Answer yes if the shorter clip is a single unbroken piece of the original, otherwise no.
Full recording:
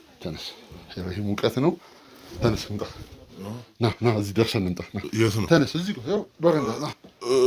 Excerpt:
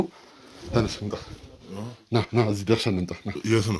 yes